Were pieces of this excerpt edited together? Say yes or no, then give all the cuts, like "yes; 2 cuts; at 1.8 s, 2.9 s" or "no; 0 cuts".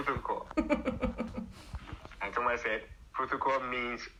no; 0 cuts